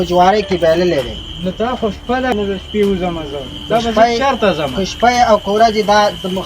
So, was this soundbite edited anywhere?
yes; 1 cut; at 2.4 s

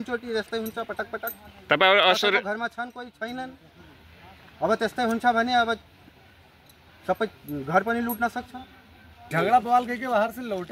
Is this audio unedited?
no; 1 cut; at 9.3 s

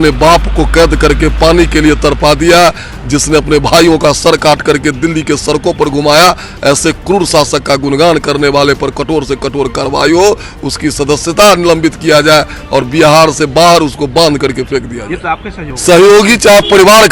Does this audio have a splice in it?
yes; 1 cut; at 15.7 s

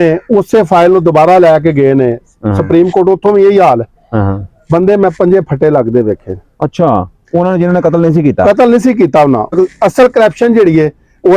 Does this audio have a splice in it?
yes; 1 cut; at 9.5 s

